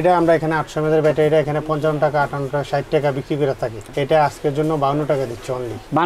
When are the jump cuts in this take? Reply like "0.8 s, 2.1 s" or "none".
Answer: none

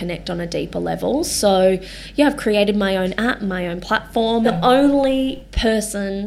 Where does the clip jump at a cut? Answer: 4.5 s

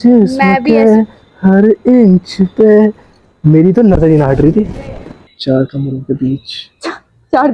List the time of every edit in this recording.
5.3 s

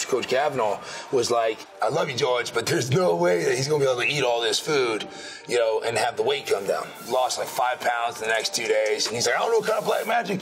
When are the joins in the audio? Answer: 1.7 s, 6.9 s

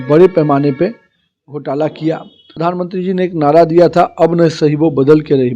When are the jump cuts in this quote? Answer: 2.4 s

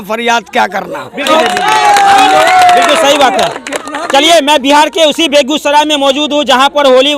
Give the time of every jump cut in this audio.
1.3 s

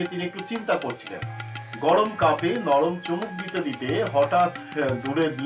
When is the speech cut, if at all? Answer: 1.5 s

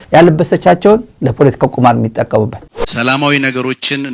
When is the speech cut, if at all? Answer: 1.1 s, 2.6 s

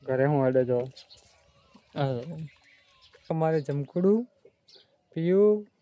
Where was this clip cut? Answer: 3.3 s

